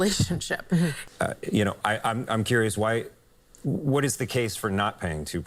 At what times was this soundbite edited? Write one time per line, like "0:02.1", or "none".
0:01.0